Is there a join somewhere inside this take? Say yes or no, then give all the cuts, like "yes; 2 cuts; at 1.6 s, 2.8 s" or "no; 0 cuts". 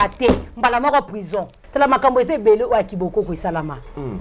yes; 1 cut; at 1.6 s